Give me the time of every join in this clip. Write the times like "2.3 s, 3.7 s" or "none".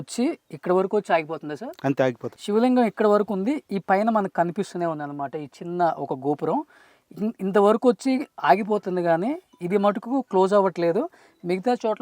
2.3 s